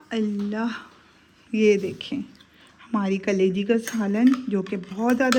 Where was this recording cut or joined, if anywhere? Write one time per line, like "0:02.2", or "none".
none